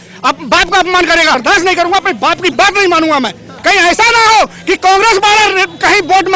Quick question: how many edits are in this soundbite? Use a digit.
2